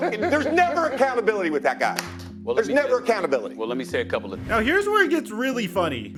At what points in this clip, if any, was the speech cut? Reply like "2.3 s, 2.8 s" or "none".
none